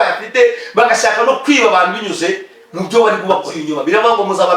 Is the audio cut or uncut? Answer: cut